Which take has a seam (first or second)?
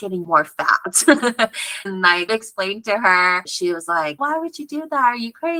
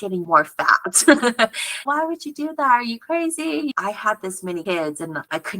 second